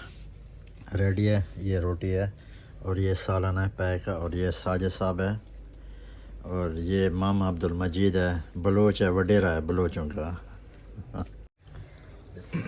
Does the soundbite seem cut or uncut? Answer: cut